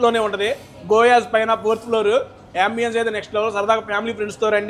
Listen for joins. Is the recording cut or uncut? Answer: uncut